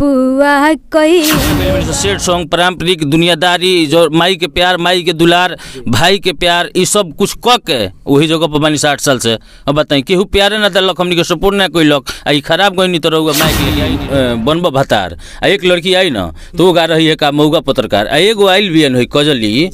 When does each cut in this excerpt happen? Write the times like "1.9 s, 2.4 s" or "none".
1.8 s, 13.7 s